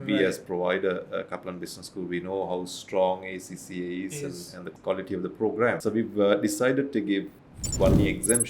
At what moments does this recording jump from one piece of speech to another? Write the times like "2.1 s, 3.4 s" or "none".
4.6 s, 5.8 s, 7.4 s

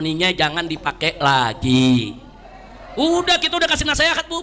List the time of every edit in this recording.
none

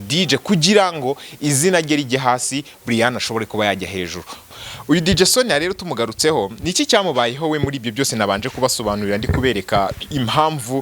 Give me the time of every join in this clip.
4.5 s

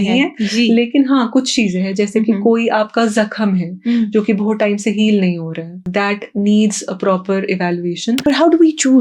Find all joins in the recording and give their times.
5.8 s, 8.2 s

